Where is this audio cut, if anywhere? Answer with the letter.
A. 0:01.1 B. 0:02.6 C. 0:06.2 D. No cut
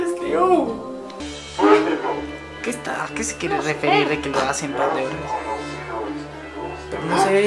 A